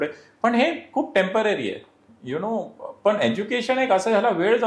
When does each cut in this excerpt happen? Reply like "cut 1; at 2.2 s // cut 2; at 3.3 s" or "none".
none